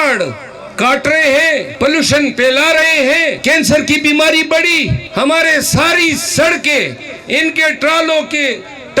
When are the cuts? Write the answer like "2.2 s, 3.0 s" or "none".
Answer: 1.7 s, 3.4 s, 5.0 s